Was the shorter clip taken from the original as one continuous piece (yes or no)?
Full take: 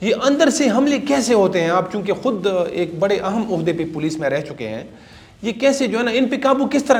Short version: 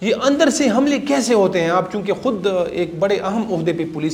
yes